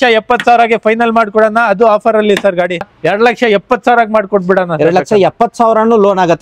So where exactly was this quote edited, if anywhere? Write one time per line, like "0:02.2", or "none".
0:02.9